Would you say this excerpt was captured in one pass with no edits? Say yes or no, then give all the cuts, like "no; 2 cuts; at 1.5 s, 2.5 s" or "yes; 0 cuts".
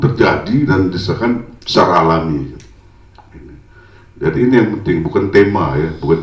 yes; 0 cuts